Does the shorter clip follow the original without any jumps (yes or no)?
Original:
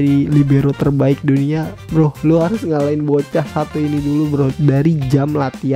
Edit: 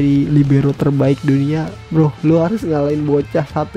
yes